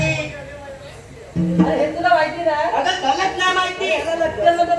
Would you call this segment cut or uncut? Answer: cut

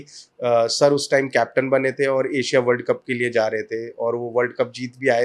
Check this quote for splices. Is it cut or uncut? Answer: uncut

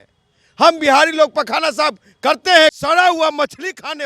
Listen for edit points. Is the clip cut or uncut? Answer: cut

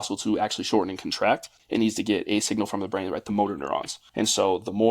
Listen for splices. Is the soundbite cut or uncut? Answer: cut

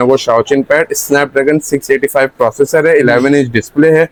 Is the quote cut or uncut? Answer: uncut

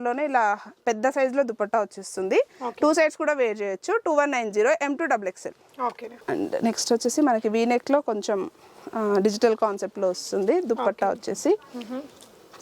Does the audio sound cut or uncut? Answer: uncut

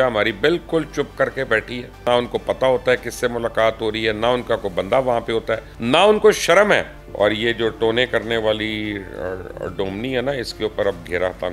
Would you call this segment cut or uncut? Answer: cut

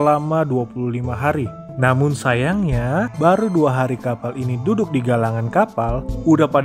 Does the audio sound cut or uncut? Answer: uncut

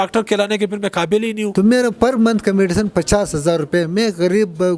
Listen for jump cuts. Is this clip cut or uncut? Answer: cut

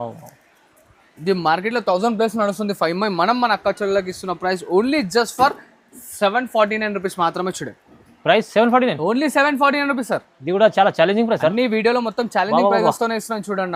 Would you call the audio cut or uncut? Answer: uncut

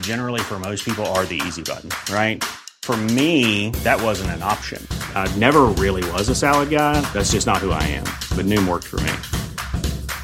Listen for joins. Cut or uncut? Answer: uncut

